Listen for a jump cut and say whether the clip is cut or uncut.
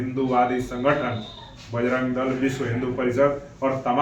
uncut